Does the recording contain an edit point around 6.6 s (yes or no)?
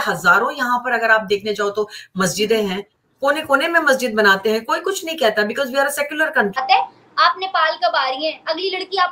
yes